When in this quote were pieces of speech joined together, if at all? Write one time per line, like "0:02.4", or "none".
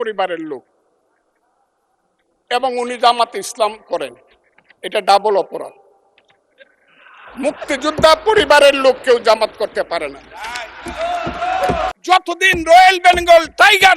0:12.0